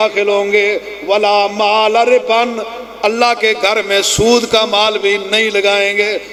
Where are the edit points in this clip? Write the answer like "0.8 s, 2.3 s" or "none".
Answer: none